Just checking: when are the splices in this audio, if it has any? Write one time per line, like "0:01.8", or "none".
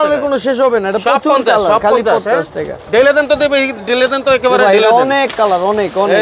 none